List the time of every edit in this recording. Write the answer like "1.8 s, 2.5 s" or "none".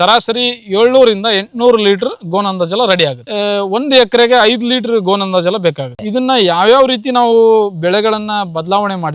3.2 s, 5.9 s